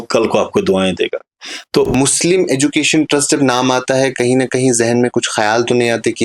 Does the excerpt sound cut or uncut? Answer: cut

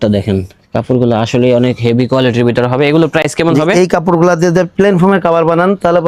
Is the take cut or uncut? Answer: uncut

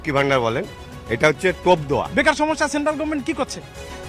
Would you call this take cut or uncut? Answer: cut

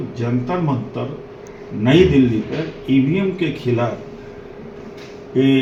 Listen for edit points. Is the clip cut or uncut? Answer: uncut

